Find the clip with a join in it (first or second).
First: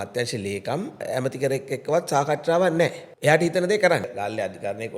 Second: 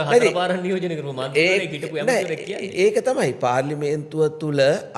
first